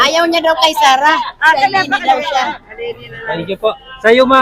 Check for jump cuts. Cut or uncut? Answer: uncut